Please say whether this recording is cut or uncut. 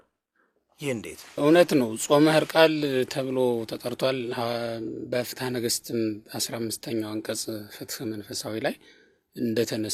uncut